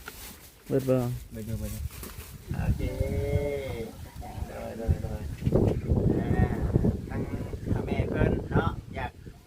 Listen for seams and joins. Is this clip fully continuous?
no; 1 cut; at 2.4 s

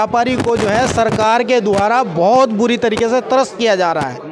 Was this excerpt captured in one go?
yes; 0 cuts

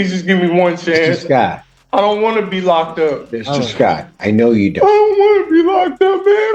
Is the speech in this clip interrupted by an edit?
no; 0 cuts

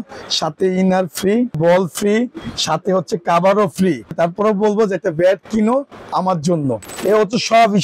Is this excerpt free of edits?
no; 3 cuts; at 1.6 s, 4.1 s, 6.9 s

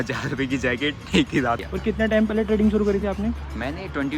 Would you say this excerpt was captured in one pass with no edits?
no; 1 cut; at 1.6 s

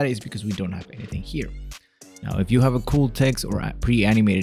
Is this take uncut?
yes; 0 cuts

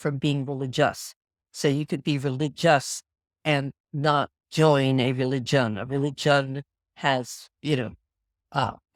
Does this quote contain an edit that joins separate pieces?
no; 0 cuts

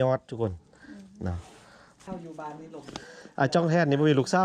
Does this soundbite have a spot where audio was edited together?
yes; 1 cut; at 2.0 s

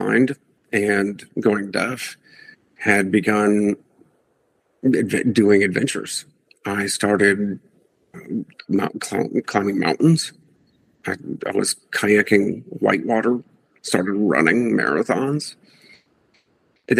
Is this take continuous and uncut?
yes; 0 cuts

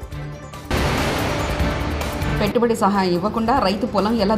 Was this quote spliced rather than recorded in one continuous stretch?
yes; 2 cuts; at 0.7 s, 2.2 s

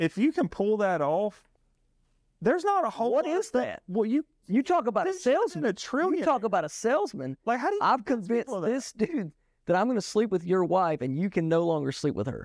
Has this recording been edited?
no; 0 cuts

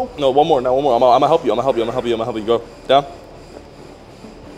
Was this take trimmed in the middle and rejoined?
no; 0 cuts

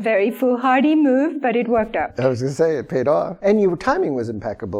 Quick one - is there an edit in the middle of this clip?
yes; 1 cut; at 2.1 s

